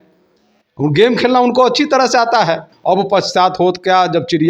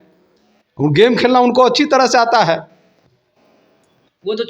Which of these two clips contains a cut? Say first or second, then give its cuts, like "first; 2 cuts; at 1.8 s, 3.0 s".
first; 1 cut; at 2.7 s